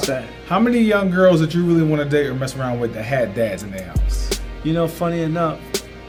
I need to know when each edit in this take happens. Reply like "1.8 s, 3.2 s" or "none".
none